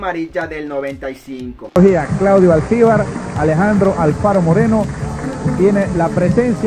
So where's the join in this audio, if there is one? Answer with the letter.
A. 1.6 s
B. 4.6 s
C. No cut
A